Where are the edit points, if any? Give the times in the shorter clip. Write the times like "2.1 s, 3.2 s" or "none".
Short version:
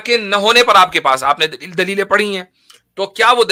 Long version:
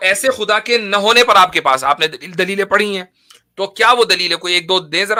none